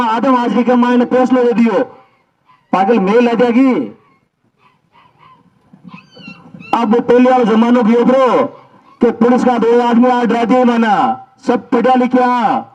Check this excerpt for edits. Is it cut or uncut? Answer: uncut